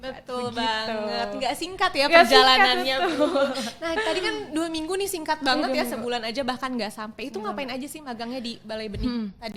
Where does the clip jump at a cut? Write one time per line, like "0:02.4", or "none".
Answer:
none